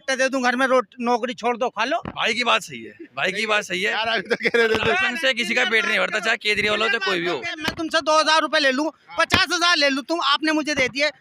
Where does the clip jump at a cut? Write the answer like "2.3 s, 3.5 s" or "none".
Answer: 2.1 s, 7.5 s